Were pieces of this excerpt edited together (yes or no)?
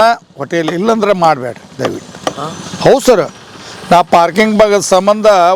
no